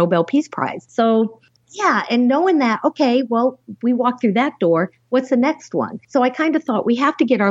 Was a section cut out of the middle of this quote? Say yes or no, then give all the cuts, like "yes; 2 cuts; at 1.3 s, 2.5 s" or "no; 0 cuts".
yes; 1 cut; at 6.0 s